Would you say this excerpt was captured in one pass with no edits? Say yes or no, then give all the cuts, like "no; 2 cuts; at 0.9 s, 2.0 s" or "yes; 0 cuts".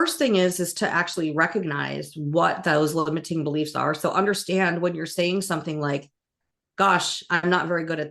yes; 0 cuts